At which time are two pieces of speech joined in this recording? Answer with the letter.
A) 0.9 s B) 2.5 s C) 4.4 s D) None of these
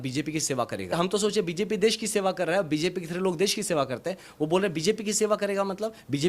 A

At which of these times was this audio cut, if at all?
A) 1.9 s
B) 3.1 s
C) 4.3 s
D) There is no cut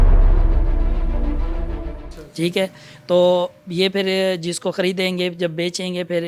D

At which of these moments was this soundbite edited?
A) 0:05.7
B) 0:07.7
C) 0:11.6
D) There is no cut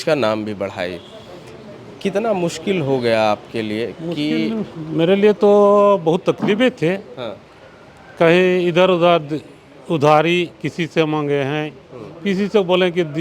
D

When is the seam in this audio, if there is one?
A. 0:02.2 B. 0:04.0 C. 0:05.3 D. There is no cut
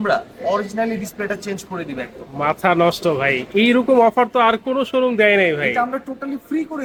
D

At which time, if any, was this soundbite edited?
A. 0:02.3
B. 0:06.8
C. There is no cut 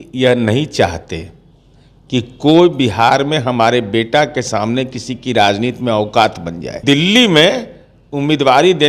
B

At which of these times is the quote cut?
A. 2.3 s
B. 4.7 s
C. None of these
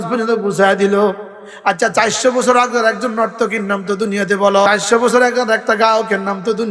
B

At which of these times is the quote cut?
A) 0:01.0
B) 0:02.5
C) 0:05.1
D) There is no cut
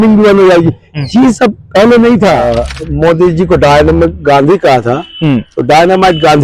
B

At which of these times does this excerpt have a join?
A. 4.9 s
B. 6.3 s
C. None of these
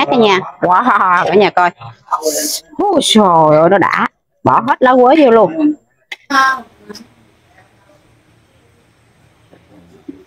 B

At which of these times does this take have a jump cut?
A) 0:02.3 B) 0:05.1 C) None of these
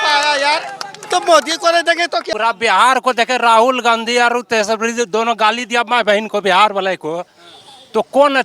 A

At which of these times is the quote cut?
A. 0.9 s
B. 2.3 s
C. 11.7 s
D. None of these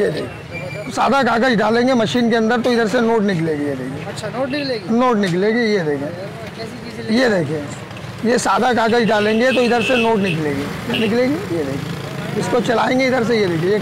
A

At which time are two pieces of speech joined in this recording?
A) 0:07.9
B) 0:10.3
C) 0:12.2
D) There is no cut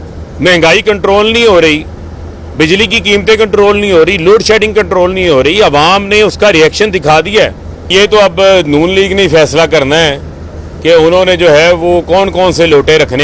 A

